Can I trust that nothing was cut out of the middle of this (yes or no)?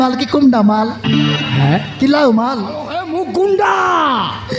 no